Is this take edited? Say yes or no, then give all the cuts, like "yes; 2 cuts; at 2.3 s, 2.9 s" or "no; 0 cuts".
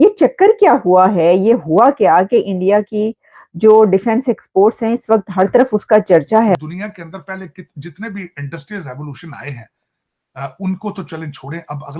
yes; 1 cut; at 6.5 s